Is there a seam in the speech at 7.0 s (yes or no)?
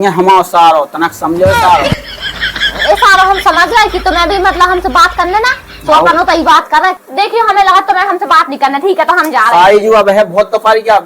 yes